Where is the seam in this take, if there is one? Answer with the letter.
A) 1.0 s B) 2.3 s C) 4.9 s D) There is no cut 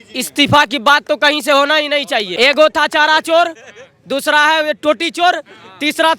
B